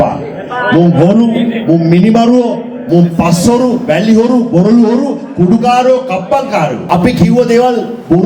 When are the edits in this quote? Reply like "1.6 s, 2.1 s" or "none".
6.8 s